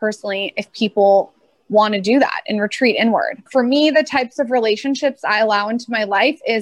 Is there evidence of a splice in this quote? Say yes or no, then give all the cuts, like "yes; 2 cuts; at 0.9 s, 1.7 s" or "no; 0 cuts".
yes; 1 cut; at 3.4 s